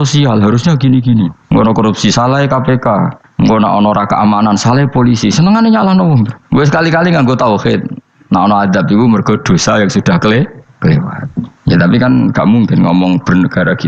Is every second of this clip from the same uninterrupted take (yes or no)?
no